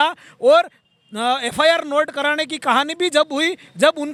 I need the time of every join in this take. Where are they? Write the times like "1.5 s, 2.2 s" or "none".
none